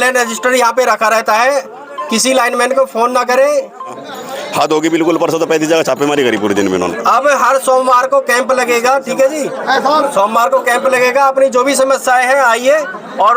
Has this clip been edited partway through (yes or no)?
yes